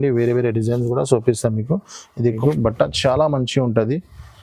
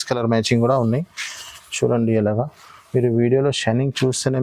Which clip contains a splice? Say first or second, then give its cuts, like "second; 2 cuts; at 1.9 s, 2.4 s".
first; 1 cut; at 2.2 s